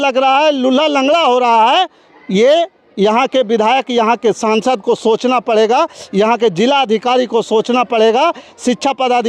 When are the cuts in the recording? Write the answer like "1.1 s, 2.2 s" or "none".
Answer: none